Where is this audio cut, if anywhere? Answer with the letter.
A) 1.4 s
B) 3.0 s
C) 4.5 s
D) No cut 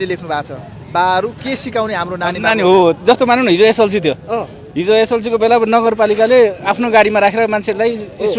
D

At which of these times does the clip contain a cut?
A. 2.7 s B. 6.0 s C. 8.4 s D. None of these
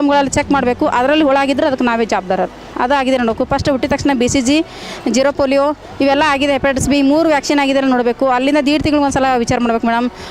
A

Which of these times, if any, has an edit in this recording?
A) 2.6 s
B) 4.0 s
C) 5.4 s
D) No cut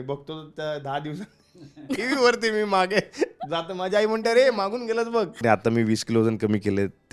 C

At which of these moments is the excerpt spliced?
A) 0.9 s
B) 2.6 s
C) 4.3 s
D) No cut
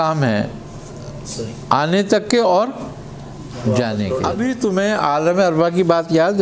C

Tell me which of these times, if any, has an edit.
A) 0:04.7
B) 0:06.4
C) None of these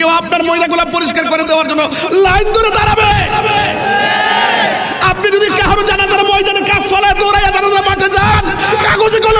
C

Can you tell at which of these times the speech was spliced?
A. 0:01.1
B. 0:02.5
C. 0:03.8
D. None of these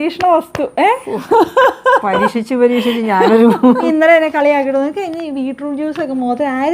C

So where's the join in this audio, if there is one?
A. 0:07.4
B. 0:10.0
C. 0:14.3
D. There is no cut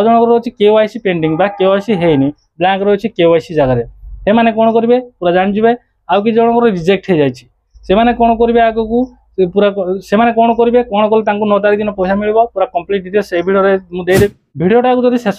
C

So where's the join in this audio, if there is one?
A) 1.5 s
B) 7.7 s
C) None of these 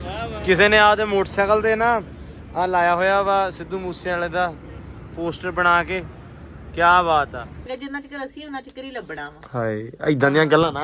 B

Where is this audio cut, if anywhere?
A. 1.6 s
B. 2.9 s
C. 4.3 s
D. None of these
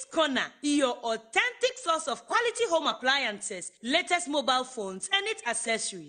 D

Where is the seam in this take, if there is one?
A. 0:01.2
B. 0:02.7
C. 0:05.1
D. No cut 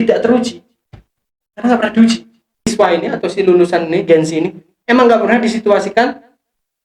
B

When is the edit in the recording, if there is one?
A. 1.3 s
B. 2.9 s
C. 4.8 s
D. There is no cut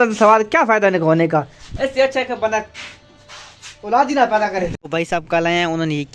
C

